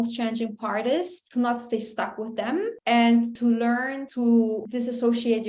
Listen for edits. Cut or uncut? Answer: cut